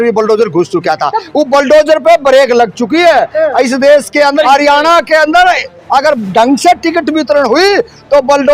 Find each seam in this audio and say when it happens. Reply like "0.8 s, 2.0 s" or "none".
4.4 s